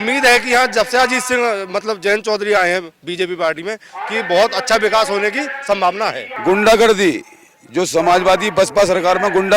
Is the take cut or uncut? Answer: cut